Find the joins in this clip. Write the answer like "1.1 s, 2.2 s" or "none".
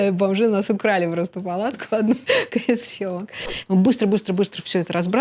3.4 s